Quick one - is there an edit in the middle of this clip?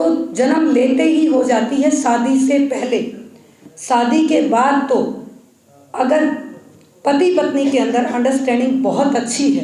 no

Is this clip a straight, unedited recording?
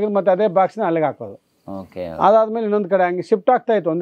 yes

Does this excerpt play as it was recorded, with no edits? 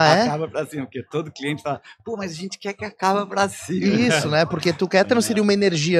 yes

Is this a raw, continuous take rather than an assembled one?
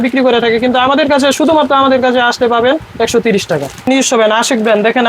no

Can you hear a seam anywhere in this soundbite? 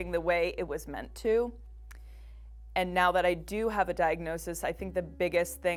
no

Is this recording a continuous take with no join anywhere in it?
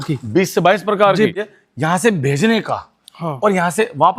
no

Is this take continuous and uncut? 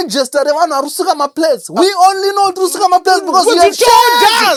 yes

